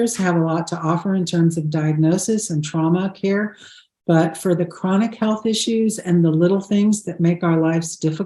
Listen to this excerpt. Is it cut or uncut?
uncut